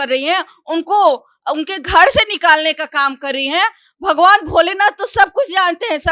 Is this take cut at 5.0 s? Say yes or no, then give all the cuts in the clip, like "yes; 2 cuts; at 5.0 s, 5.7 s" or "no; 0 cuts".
no; 0 cuts